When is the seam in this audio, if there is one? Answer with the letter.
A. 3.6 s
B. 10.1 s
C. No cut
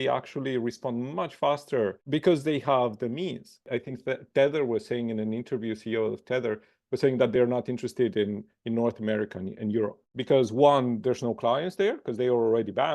A